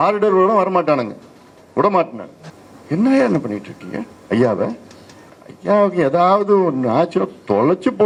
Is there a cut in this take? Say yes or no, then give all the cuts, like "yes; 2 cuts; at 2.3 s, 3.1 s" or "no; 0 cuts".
no; 0 cuts